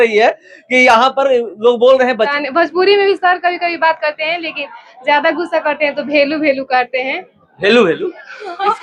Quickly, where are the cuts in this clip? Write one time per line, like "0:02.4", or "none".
0:02.3

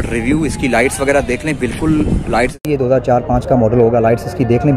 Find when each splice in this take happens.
0:02.7

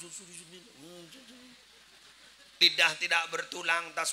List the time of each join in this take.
0:02.6

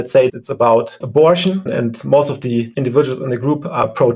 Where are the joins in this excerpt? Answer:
none

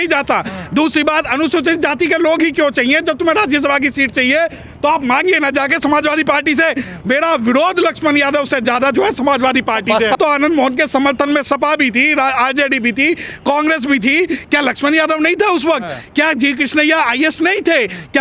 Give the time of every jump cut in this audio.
0:10.2

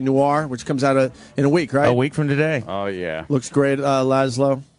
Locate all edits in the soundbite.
none

